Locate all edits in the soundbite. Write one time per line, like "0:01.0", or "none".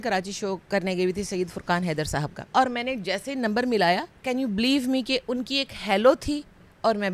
0:02.5
0:04.1

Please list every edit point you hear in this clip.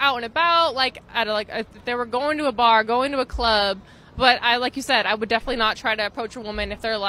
none

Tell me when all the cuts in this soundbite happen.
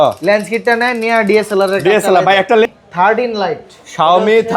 0:02.7

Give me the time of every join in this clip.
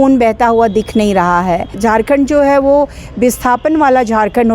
0:01.8

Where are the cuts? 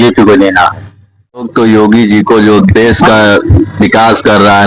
0:01.5

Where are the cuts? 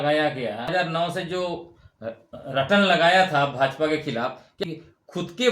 0:00.7
0:04.6

